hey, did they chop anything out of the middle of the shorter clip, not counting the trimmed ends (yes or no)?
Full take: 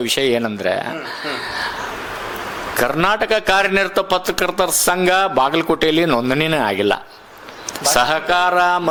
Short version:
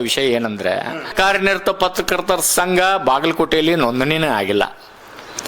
yes